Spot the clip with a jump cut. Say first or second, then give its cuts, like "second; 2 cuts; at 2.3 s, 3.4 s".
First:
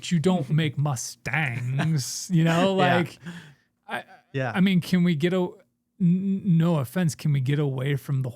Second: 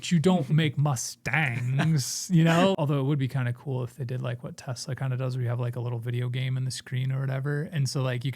second; 1 cut; at 2.8 s